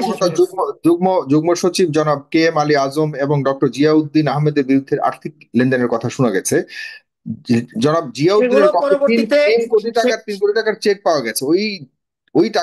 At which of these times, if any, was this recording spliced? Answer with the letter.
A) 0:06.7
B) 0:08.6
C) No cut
C